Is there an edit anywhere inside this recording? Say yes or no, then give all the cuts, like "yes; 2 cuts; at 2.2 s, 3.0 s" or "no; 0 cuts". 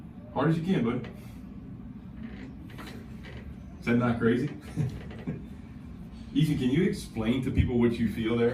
no; 0 cuts